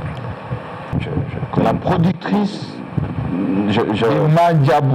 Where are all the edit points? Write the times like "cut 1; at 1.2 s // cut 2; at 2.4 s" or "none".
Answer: cut 1; at 0.9 s